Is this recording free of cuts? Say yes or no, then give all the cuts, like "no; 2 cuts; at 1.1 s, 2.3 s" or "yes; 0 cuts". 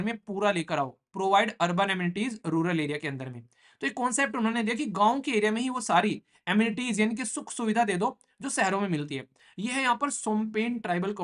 no; 1 cut; at 9.4 s